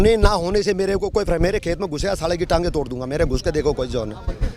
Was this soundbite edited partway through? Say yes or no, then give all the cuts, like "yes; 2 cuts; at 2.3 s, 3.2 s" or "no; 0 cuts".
no; 0 cuts